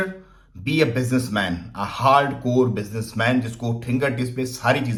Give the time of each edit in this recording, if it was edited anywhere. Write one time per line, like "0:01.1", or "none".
none